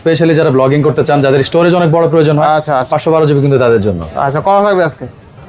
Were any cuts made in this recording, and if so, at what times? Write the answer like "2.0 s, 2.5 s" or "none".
none

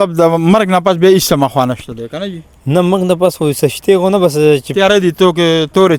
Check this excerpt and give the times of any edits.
none

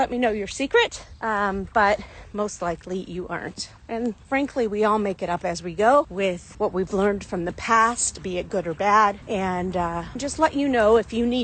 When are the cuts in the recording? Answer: 10.1 s

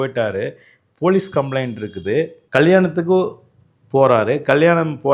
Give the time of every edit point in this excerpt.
2.4 s

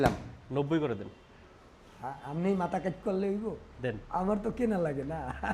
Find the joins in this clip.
none

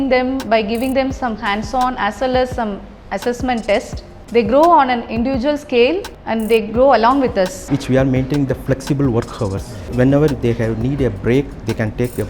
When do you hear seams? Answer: 6.1 s, 7.6 s, 9.8 s

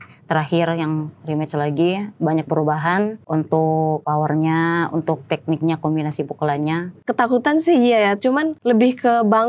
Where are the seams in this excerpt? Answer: 3.2 s, 4.0 s, 7.0 s, 8.5 s

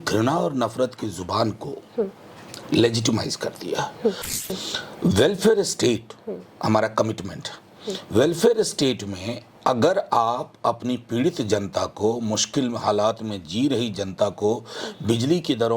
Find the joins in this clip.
4.4 s

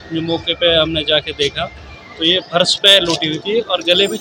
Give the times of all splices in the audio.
none

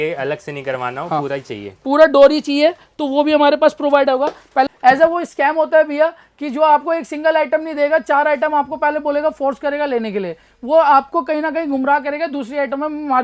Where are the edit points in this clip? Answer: 4.7 s

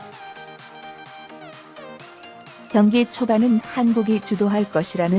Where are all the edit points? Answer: 2.7 s

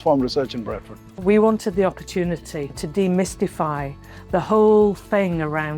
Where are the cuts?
1.1 s

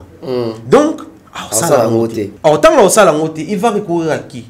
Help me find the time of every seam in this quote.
2.3 s

